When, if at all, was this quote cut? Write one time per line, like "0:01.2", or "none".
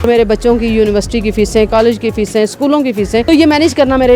0:03.2